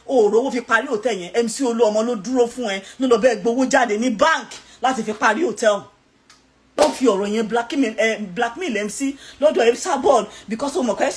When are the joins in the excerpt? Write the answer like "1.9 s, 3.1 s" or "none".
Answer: 6.8 s